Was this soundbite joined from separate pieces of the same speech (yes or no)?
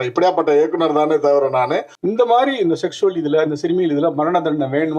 yes